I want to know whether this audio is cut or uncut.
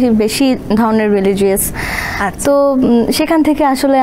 uncut